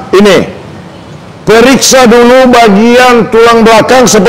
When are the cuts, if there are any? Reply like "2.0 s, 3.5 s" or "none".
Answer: none